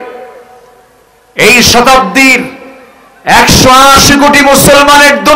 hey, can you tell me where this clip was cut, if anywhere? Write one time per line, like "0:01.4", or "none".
none